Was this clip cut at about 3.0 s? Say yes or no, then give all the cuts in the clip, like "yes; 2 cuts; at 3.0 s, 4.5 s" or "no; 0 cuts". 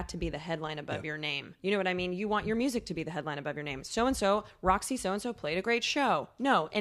no; 1 cut; at 1.5 s